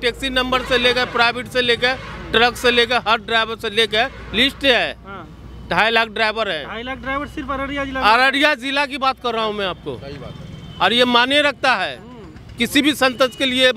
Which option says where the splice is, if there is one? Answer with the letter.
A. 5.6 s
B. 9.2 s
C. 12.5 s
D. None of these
D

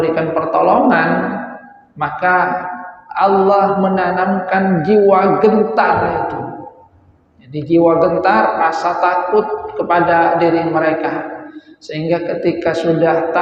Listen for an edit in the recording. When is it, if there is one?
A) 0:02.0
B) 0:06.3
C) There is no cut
C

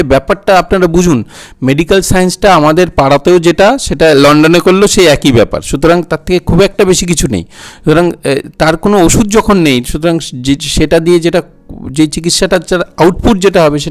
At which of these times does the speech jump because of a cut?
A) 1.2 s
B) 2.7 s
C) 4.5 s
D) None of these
D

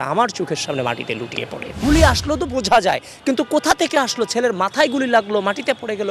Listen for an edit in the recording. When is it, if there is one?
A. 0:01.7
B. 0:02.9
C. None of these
A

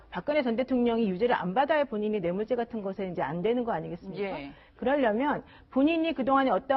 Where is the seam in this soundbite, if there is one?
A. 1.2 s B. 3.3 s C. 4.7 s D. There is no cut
C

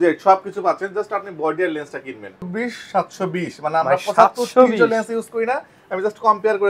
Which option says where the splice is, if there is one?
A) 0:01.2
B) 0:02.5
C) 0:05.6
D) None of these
B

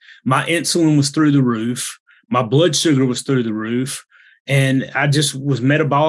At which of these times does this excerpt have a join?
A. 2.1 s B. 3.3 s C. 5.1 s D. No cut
D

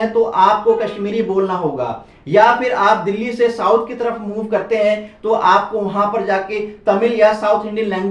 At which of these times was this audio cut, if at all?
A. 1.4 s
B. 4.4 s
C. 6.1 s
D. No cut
D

